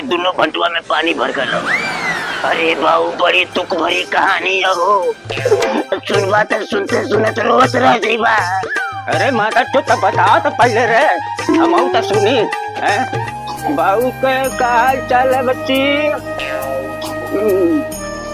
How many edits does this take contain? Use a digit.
1